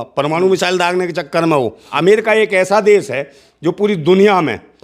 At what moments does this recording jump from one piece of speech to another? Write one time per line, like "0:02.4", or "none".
0:01.9

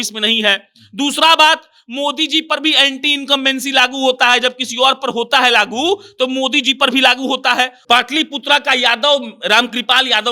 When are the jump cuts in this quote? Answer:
0:07.8

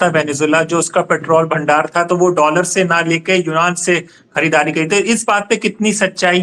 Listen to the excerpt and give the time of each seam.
none

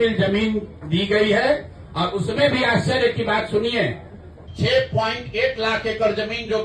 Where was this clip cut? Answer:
0:04.4

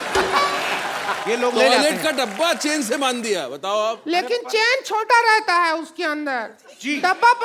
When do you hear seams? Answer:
0:01.2

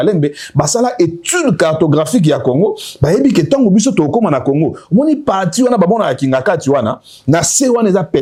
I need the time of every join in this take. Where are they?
none

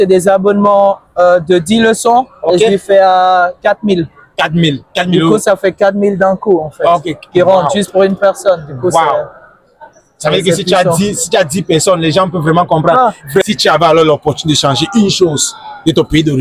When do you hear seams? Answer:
0:13.2

